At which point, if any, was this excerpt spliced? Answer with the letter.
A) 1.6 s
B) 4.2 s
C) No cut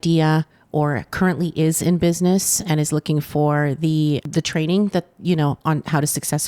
B